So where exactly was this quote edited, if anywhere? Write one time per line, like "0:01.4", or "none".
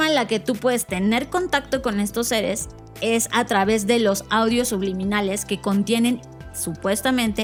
none